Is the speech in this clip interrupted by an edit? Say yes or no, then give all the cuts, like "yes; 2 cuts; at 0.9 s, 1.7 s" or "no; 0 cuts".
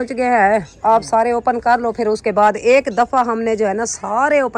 no; 0 cuts